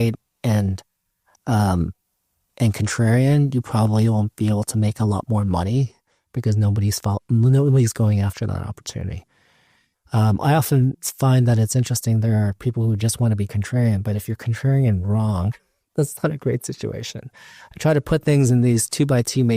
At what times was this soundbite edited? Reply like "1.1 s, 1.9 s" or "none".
none